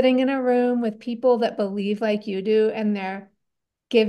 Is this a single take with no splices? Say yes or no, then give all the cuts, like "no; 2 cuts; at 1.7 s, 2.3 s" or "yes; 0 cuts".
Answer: yes; 0 cuts